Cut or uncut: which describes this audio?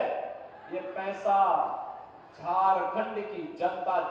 uncut